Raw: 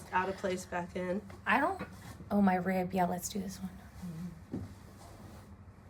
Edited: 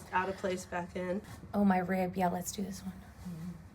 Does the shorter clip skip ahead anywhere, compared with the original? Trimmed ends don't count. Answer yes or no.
yes